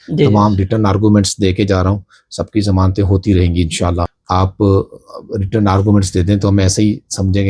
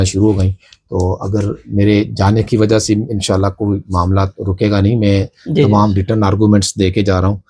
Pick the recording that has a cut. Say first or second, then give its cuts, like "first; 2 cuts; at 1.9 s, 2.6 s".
first; 1 cut; at 4.1 s